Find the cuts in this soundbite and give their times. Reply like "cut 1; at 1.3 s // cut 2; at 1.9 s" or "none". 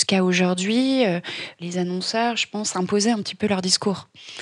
cut 1; at 1.5 s